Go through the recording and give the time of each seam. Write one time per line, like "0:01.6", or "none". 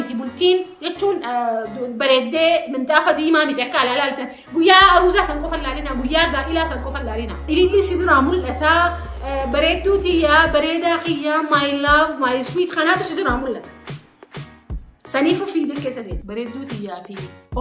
0:07.4
0:16.2

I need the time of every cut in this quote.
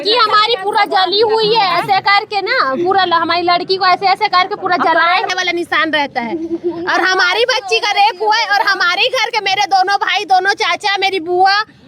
0:05.3

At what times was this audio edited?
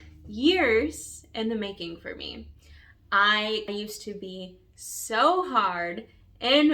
0:03.7

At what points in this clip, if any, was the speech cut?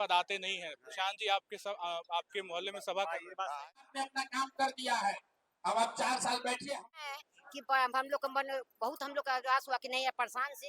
0:03.6
0:07.0

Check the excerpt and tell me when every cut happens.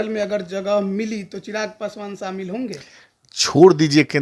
none

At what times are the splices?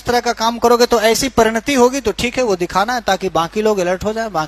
none

